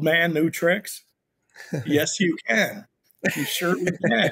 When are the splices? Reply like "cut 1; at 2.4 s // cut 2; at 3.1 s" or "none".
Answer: none